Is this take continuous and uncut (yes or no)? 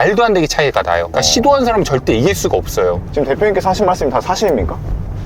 yes